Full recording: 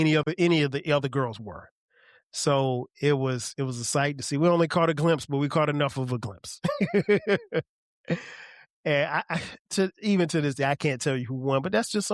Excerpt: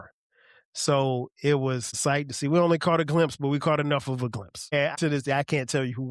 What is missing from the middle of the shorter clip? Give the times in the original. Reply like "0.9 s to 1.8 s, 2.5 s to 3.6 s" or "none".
3.5 s to 3.8 s, 6.8 s to 10.2 s